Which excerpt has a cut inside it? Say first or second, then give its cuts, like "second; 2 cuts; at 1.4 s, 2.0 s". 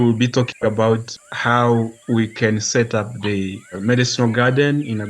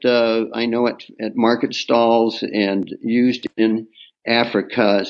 first; 3 cuts; at 1.1 s, 2.0 s, 3.8 s